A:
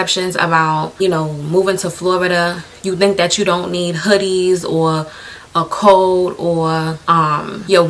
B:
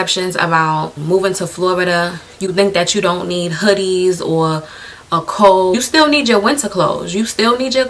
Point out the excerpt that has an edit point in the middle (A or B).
B